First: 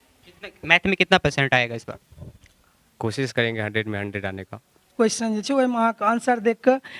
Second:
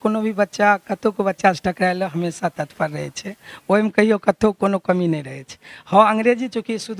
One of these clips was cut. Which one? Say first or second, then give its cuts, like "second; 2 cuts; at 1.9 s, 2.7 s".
first; 1 cut; at 4.9 s